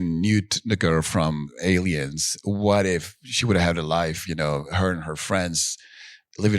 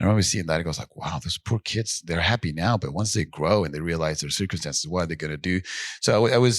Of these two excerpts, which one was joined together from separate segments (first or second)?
first